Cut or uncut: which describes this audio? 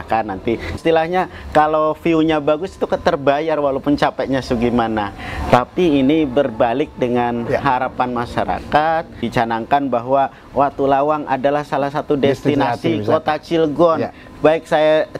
cut